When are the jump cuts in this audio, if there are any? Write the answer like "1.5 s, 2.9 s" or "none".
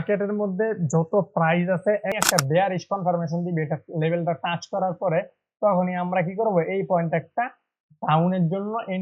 2.2 s